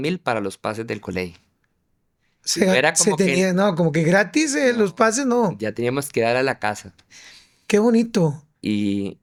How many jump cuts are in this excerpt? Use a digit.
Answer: 0